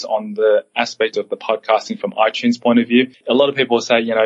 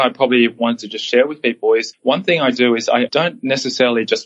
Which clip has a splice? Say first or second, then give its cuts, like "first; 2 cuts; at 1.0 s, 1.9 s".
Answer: second; 1 cut; at 3.1 s